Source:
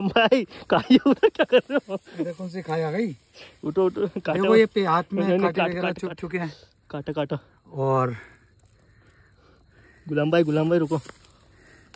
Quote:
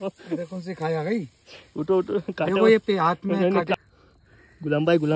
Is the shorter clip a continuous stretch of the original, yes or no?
no